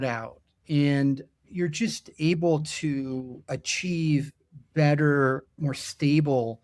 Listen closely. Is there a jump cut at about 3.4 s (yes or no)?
yes